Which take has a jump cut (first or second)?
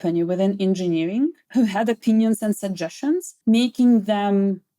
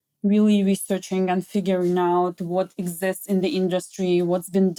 first